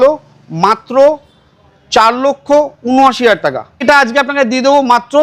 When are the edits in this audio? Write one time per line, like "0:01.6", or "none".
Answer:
0:03.8